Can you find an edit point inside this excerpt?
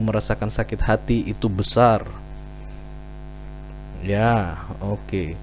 no; 0 cuts

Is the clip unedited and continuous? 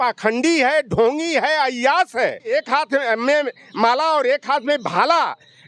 no; 1 cut; at 2.5 s

